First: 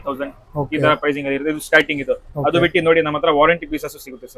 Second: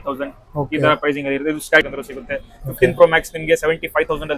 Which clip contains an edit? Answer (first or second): second